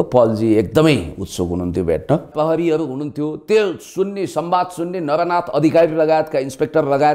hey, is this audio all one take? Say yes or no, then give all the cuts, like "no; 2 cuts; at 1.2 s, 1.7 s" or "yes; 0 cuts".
no; 1 cut; at 2.3 s